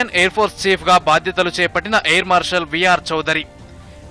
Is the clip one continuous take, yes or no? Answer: yes